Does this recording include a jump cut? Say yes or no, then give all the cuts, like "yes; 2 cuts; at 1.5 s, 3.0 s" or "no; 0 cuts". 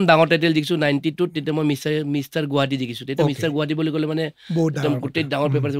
no; 0 cuts